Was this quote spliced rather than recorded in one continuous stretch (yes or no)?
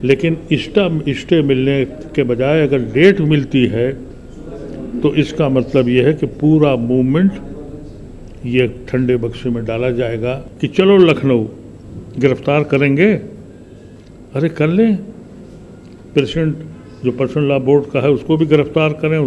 yes